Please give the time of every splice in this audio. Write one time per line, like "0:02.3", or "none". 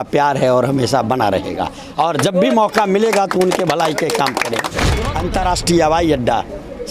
0:04.9